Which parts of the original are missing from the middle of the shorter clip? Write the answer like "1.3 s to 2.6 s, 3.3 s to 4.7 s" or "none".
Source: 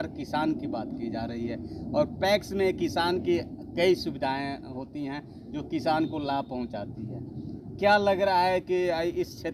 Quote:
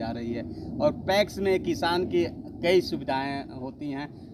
none